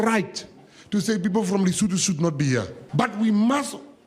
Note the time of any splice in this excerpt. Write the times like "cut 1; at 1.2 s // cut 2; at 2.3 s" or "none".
cut 1; at 2.8 s